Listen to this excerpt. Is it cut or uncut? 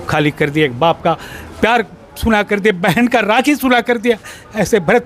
uncut